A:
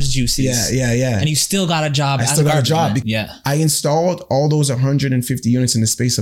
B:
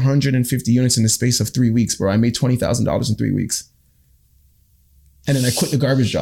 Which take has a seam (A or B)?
A